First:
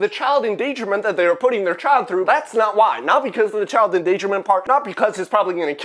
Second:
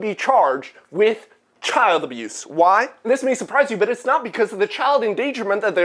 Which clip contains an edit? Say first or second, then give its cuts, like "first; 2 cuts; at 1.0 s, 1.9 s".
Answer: first; 2 cuts; at 2.2 s, 4.6 s